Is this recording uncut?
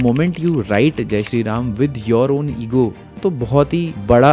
no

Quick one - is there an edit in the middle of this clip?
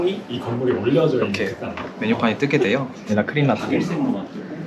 yes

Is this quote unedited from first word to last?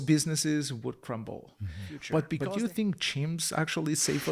no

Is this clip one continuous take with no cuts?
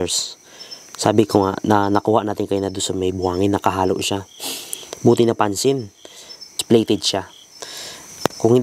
no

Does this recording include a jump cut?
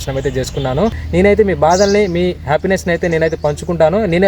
yes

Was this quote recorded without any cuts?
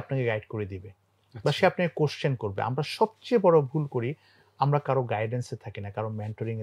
yes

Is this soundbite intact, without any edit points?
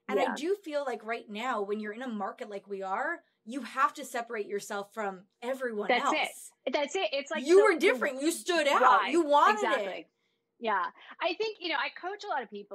yes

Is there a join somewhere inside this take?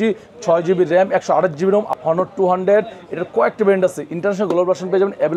yes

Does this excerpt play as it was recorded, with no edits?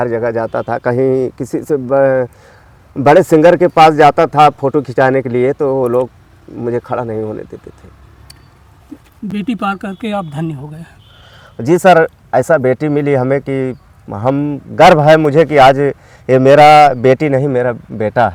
yes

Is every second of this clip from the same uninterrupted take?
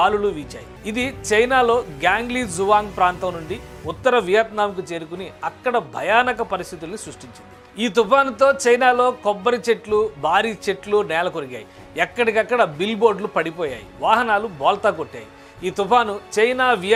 yes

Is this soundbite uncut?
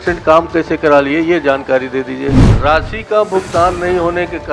no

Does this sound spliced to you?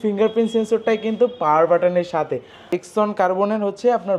yes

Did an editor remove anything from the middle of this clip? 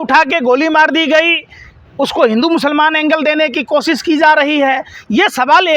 no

